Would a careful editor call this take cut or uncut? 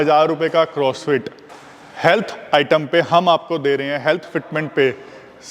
uncut